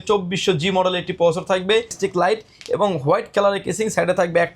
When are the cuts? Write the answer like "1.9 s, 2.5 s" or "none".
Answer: 1.9 s